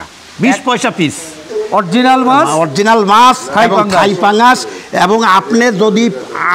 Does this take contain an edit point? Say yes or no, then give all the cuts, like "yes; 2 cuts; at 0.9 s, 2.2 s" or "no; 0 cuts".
no; 0 cuts